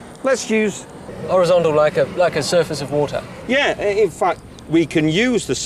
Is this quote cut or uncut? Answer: uncut